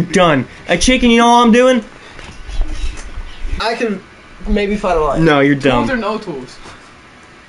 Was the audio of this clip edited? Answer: yes; 1 cut; at 3.6 s

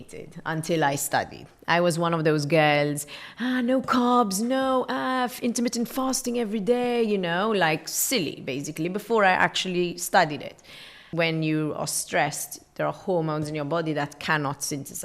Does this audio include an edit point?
yes; 1 cut; at 11.0 s

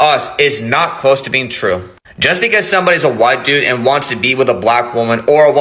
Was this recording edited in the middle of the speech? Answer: no; 0 cuts

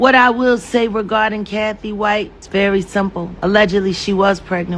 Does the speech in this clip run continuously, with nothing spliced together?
no; 2 cuts; at 2.4 s, 3.3 s

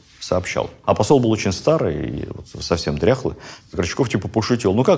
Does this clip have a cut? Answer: yes; 1 cut; at 1.0 s

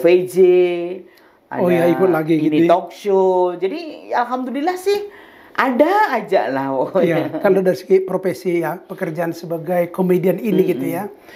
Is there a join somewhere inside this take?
no; 0 cuts

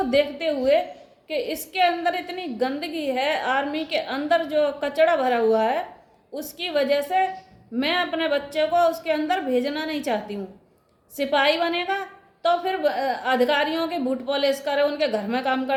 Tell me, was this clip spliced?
no; 0 cuts

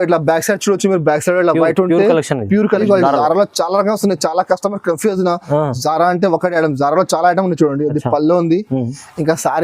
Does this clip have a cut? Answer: yes; 1 cut; at 2.8 s

